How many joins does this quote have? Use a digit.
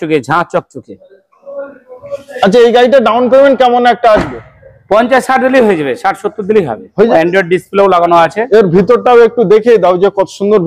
1